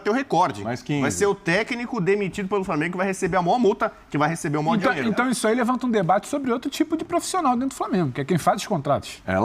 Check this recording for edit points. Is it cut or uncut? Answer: uncut